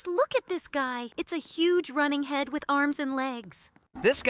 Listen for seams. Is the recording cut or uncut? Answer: cut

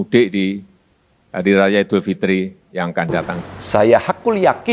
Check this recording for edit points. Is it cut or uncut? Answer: cut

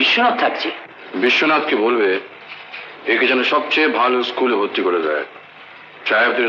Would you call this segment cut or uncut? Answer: uncut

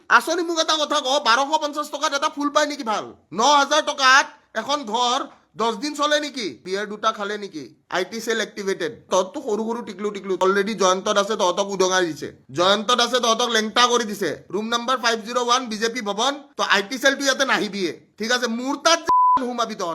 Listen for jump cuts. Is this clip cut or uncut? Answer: cut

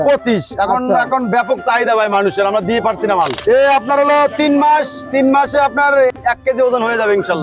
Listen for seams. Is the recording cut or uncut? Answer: cut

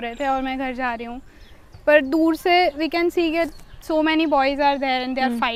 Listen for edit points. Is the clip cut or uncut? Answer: uncut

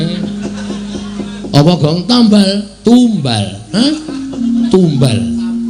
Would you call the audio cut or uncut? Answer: uncut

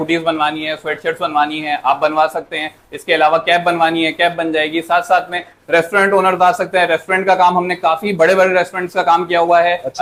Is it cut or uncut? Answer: uncut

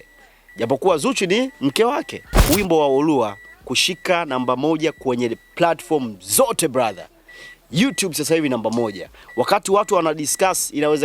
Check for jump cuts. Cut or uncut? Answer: cut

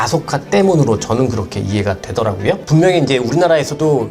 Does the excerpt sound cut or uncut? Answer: cut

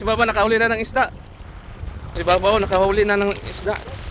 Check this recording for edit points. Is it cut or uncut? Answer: cut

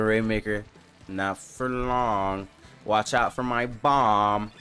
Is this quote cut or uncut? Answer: uncut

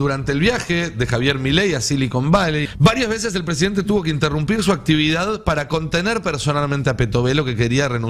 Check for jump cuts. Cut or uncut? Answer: cut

